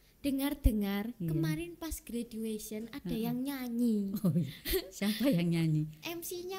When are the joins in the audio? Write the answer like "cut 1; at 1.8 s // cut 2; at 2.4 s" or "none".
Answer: none